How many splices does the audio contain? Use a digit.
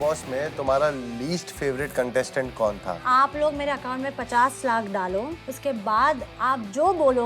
2